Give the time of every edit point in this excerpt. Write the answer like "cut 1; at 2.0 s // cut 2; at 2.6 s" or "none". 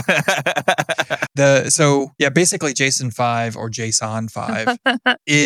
cut 1; at 1.2 s // cut 2; at 2.1 s

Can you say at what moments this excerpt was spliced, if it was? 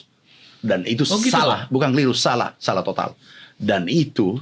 none

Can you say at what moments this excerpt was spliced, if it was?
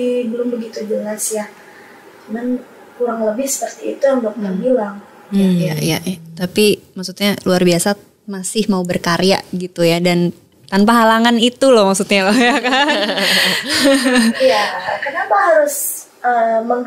none

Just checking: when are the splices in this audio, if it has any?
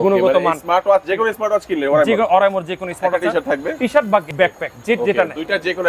cut 1; at 4.3 s

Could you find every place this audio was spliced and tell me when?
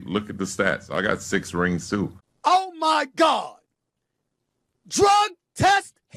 cut 1; at 2.2 s

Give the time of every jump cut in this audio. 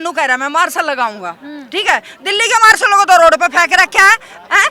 none

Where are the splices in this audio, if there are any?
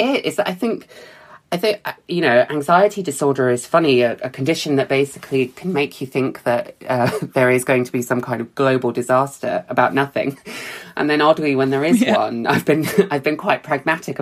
none

